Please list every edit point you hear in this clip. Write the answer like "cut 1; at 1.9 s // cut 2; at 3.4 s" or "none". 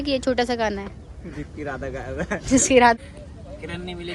cut 1; at 3.0 s